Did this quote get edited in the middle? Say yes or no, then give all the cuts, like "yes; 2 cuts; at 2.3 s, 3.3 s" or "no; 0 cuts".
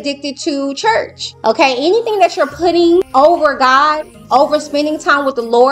yes; 2 cuts; at 1.2 s, 3.1 s